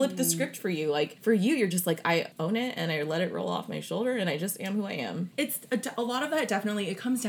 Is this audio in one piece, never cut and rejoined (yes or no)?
no